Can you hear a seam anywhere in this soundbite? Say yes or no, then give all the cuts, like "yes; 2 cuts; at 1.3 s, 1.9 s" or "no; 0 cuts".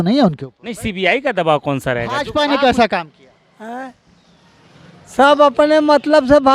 yes; 1 cut; at 2.2 s